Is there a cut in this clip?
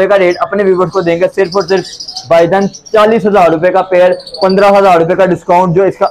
no; 0 cuts

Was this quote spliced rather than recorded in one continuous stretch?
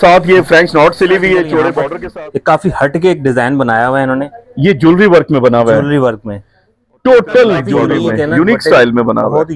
yes; 2 cuts; at 1.8 s, 7.8 s

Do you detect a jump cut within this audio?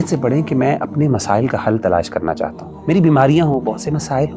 yes; 1 cut; at 2.7 s

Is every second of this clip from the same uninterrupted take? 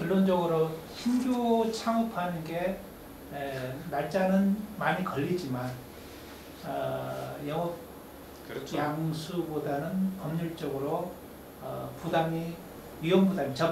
yes; 0 cuts

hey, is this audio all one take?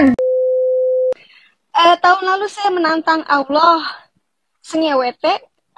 no; 1 cut; at 1.2 s

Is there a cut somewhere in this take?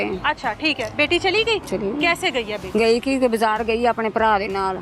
yes; 2 cuts; at 1.6 s, 2.6 s

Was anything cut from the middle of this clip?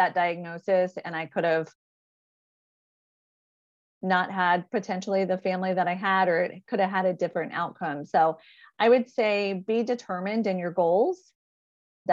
no; 0 cuts

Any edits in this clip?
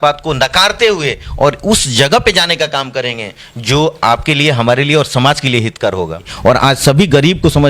yes; 1 cut; at 6.3 s

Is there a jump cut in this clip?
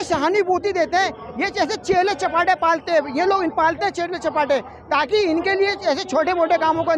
no; 0 cuts

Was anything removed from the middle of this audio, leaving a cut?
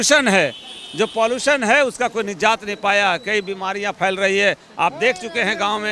no; 0 cuts

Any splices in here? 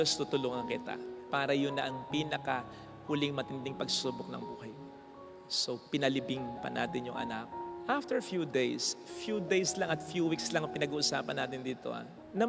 no; 0 cuts

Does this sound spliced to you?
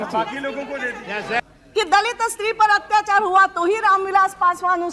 yes; 1 cut; at 1.4 s

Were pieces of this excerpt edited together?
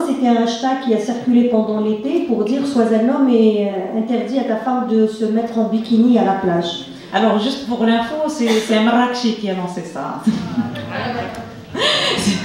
no; 0 cuts

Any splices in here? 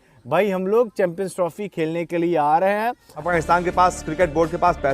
yes; 1 cut; at 3.3 s

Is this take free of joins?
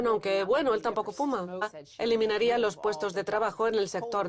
yes; 0 cuts

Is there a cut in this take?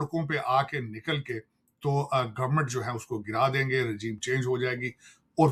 no; 0 cuts

